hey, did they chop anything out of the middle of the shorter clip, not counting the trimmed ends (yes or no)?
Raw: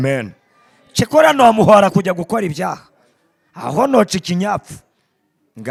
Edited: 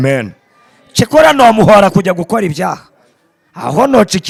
no